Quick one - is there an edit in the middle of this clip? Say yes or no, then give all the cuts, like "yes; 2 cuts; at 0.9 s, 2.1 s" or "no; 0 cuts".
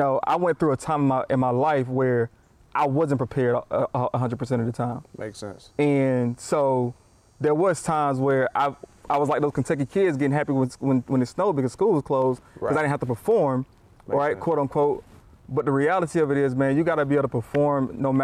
no; 0 cuts